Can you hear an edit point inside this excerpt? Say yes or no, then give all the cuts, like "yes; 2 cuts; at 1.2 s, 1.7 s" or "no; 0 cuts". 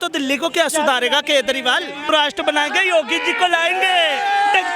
yes; 1 cut; at 2.0 s